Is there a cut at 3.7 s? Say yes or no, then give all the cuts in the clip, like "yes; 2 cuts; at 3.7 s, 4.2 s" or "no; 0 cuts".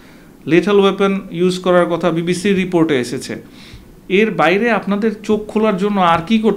no; 0 cuts